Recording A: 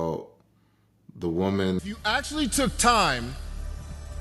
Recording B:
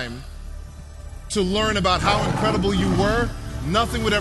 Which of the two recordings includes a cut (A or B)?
A